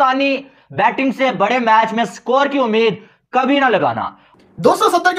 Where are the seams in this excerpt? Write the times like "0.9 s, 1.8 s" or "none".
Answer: 4.2 s